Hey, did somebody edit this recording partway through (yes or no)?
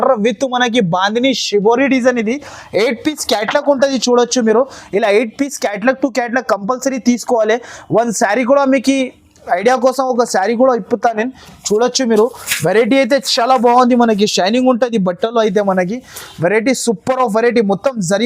no